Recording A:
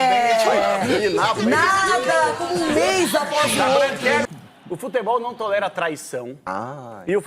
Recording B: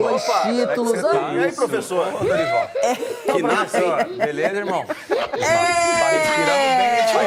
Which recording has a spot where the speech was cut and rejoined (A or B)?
A